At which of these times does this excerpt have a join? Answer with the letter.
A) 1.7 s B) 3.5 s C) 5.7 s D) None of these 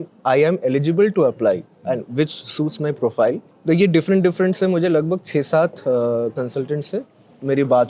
D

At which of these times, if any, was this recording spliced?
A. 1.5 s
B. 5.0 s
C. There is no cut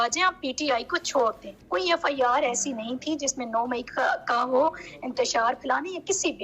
A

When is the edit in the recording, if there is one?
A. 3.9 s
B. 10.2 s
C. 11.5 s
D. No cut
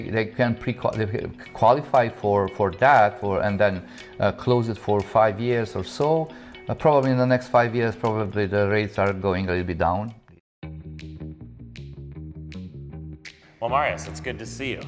B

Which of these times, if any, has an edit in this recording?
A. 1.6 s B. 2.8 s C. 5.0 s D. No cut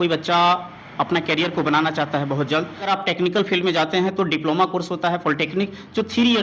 B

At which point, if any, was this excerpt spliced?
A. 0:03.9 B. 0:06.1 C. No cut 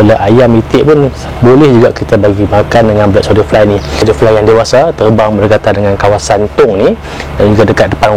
A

